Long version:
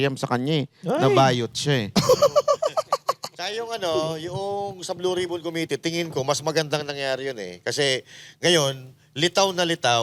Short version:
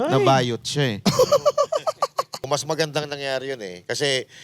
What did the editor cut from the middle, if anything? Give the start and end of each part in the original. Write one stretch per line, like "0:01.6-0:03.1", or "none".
0:03.4-0:06.2